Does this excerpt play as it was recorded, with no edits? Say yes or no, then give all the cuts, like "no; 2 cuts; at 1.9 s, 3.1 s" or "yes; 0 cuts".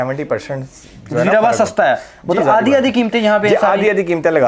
yes; 0 cuts